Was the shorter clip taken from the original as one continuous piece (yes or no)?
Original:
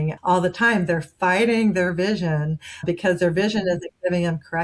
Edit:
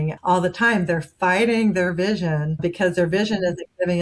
no